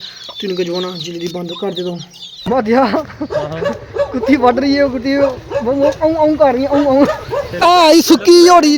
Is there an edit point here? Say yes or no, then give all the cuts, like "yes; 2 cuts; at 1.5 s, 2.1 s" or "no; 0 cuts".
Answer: yes; 2 cuts; at 2.5 s, 7.6 s